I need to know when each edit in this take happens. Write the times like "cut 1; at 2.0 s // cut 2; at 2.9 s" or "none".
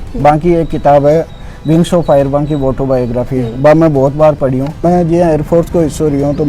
cut 1; at 4.8 s